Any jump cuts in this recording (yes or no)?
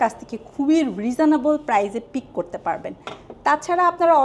no